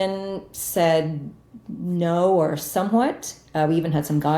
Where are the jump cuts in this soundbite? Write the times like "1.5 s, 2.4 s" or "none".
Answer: none